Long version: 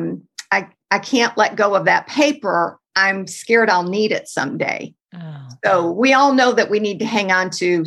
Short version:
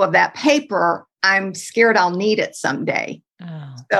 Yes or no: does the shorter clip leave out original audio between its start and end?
no